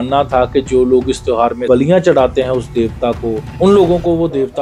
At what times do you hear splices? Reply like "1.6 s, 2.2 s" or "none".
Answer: none